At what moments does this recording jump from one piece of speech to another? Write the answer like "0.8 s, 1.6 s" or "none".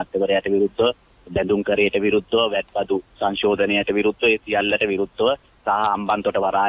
none